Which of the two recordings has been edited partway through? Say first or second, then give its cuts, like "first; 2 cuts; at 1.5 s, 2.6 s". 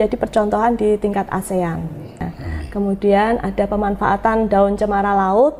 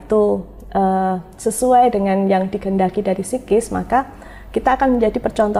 first; 1 cut; at 2.3 s